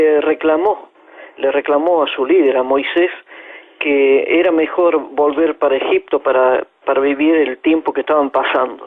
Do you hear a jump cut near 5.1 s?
yes; 1 cut; at 5.1 s

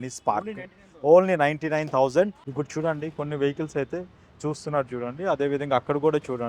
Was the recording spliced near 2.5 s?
yes; 1 cut; at 2.5 s

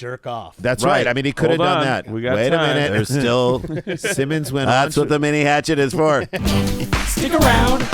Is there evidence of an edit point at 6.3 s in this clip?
yes; 1 cut; at 6.3 s

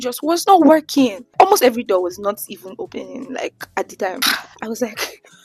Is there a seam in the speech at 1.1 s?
no; 1 cut; at 4.2 s

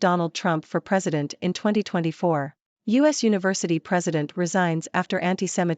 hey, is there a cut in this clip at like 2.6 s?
yes; 1 cut; at 2.6 s

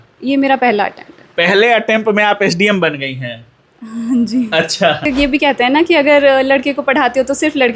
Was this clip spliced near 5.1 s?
yes; 1 cut; at 5.1 s

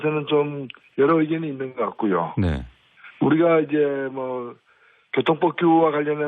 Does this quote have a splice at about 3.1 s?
yes; 1 cut; at 3.1 s

